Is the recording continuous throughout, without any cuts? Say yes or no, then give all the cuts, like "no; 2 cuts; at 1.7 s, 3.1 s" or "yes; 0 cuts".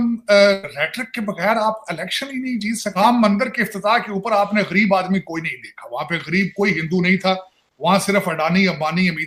yes; 0 cuts